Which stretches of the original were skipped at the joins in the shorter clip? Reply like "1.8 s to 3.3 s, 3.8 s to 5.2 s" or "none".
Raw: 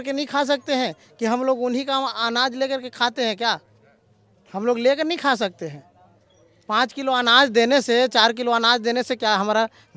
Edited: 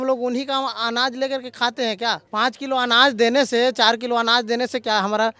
3.6 s to 6.6 s